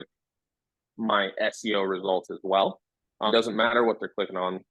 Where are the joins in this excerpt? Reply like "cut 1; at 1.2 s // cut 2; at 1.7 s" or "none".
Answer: cut 1; at 3.3 s

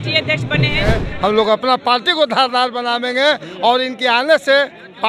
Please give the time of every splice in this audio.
cut 1; at 1.0 s

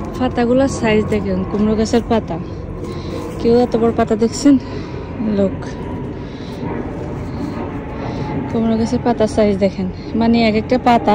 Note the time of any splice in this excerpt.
none

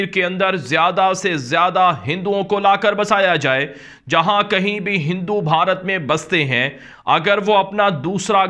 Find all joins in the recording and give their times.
none

